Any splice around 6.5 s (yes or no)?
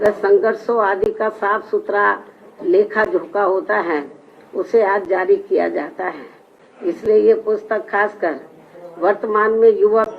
no